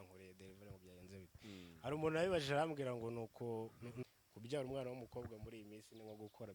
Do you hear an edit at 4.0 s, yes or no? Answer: yes